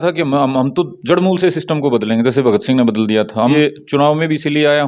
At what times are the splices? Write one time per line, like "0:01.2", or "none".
0:03.5